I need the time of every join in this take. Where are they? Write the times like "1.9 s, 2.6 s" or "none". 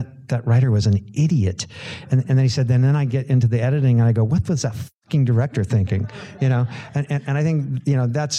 none

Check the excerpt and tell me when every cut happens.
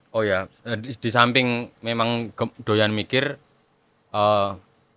none

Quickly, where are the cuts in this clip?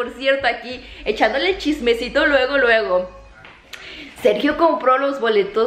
none

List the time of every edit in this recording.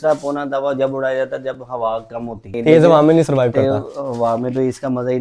2.5 s

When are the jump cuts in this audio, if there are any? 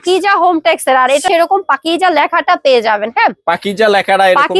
1.2 s

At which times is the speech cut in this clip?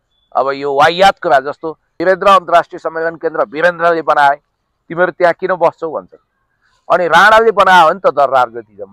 1.9 s

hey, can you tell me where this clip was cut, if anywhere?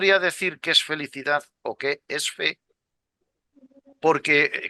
none

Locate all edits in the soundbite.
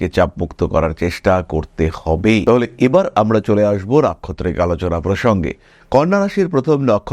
none

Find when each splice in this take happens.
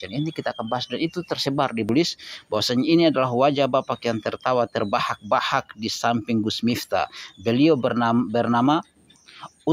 1.9 s

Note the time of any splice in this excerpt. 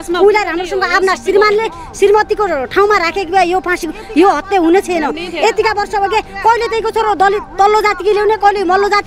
none

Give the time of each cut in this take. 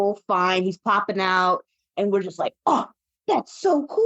1.8 s

